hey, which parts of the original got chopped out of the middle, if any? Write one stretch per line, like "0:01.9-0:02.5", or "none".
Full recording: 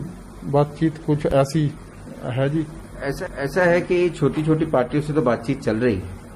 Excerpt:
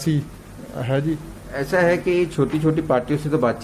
0:03.0-0:03.4